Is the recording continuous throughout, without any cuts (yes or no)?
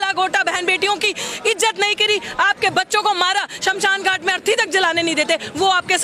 yes